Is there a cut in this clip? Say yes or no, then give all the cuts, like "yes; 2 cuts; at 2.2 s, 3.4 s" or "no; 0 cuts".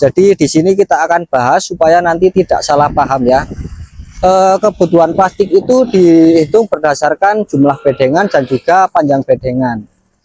no; 0 cuts